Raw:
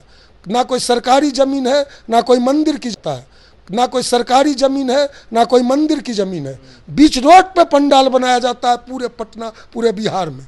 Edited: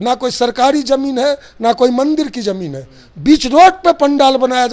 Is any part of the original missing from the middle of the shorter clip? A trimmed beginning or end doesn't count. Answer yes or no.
yes